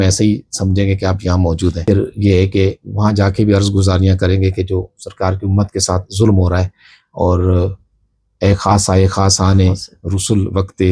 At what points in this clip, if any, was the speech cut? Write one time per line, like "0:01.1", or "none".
0:01.9

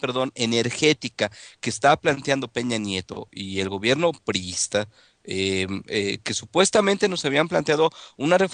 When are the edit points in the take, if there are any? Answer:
0:01.6

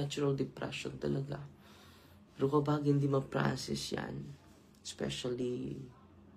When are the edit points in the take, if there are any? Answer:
none

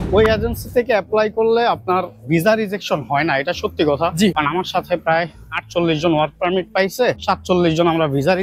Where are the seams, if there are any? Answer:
0:04.3
0:07.2

